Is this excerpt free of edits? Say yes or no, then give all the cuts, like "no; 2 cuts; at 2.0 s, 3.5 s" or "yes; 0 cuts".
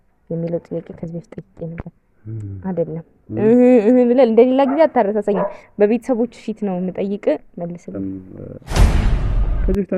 no; 1 cut; at 7.9 s